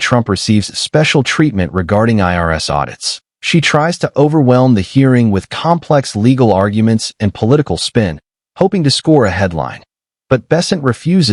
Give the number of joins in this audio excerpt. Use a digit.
0